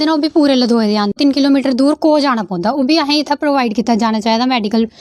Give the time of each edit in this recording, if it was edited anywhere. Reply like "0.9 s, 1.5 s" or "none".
1.1 s